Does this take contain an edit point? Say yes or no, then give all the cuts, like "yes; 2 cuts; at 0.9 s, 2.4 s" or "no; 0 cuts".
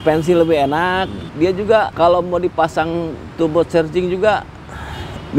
yes; 2 cuts; at 1.2 s, 1.9 s